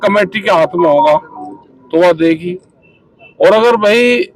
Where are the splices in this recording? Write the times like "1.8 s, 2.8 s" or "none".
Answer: none